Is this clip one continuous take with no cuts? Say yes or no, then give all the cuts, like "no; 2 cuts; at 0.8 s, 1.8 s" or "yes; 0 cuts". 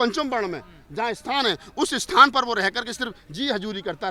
yes; 0 cuts